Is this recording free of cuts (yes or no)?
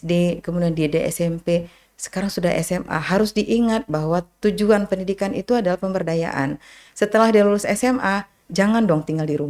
yes